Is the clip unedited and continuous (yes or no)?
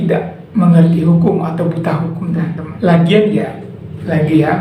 no